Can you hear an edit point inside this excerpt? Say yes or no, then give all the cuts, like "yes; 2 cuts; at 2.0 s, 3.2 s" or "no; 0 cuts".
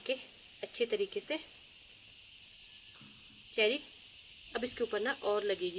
no; 0 cuts